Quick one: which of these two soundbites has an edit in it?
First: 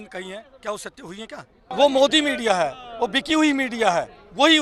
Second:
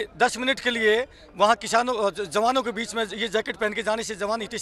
first; 1 cut; at 1.7 s

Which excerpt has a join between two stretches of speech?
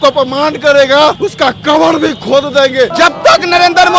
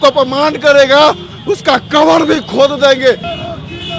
first; 2 cuts; at 1.2 s, 2.9 s

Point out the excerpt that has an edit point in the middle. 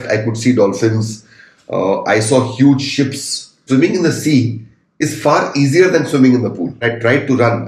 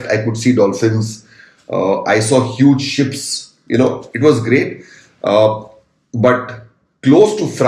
first; 2 cuts; at 3.6 s, 6.8 s

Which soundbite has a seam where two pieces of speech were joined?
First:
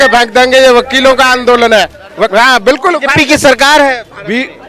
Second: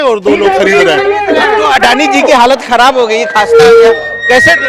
first; 1 cut; at 2.3 s

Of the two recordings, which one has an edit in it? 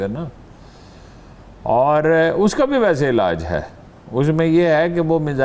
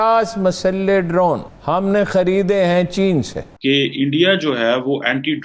second; 2 cuts; at 1.5 s, 3.4 s

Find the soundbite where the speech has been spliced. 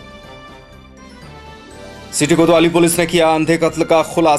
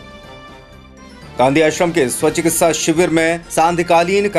first; 1 cut; at 1.3 s

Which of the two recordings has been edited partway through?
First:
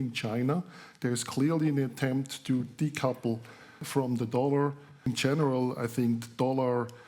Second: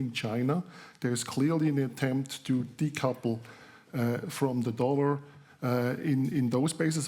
first; 2 cuts; at 3.8 s, 5.1 s

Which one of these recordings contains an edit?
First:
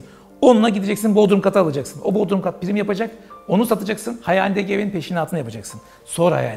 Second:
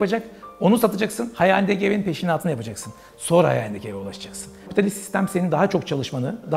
second; 1 cut; at 4.6 s

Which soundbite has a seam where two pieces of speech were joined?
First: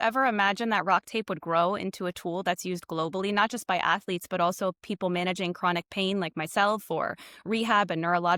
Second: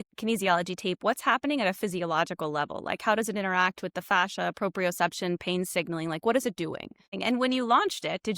second; 1 cut; at 7.1 s

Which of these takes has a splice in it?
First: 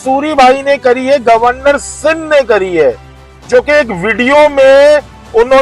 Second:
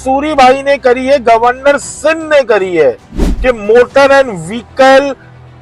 second; 1 cut; at 3.3 s

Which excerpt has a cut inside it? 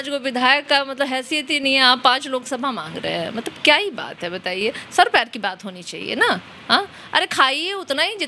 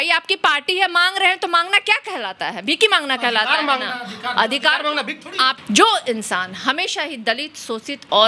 second; 1 cut; at 5.5 s

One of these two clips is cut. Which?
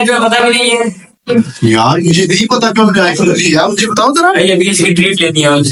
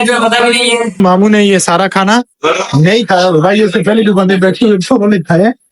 second; 1 cut; at 1.0 s

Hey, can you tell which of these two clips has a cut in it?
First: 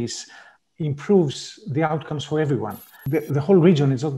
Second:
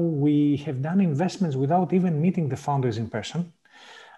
first; 1 cut; at 3.1 s

